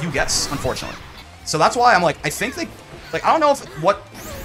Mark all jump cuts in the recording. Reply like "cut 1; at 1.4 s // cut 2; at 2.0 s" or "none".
cut 1; at 1.1 s